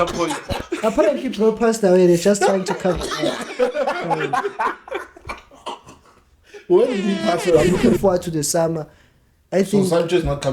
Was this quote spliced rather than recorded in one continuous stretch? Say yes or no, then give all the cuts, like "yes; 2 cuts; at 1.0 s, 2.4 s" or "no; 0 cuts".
yes; 1 cut; at 7.7 s